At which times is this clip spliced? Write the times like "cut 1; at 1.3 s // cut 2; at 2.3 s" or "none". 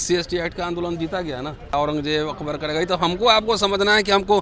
cut 1; at 1.7 s